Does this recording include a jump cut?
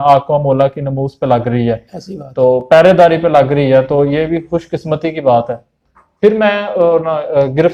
no; 0 cuts

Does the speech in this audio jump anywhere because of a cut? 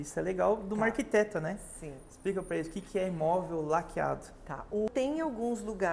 yes; 1 cut; at 4.9 s

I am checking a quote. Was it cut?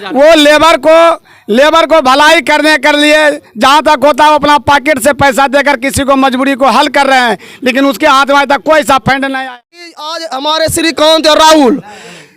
yes; 1 cut; at 9.8 s

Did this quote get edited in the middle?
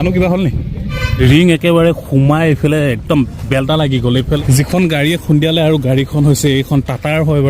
yes; 2 cuts; at 1.0 s, 4.4 s

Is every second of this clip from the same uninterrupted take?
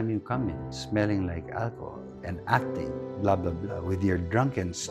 yes; 0 cuts

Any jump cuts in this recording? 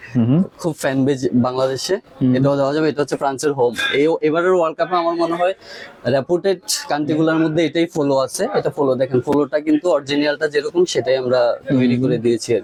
no; 0 cuts

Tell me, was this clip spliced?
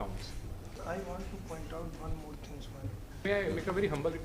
yes; 2 cuts; at 0.8 s, 3.2 s

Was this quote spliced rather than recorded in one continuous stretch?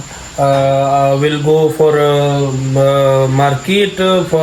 no; 0 cuts

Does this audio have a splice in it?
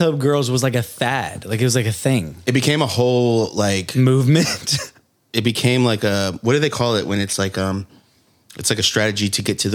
no; 0 cuts

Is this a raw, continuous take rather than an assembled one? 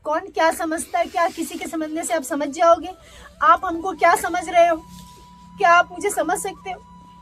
yes; 0 cuts

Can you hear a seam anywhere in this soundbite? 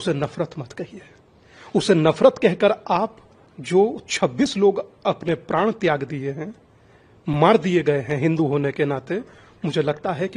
no; 0 cuts

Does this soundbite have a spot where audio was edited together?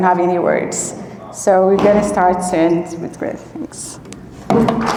no; 0 cuts

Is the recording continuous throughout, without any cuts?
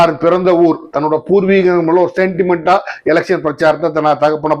yes; 0 cuts

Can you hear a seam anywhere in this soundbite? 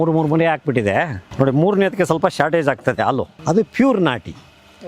yes; 2 cuts; at 1.2 s, 3.3 s

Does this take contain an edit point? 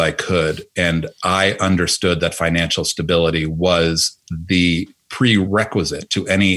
yes; 1 cut; at 5.5 s

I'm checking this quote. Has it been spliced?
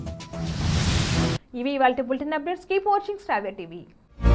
no; 0 cuts

